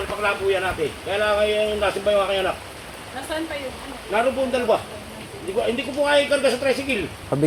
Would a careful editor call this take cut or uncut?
uncut